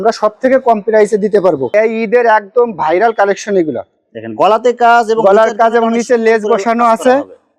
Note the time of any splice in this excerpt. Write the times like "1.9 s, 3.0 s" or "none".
1.6 s